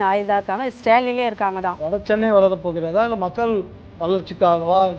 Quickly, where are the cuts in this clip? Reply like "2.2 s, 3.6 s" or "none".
1.8 s